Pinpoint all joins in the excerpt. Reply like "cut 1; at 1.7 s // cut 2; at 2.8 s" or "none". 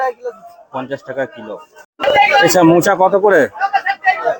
cut 1; at 1.9 s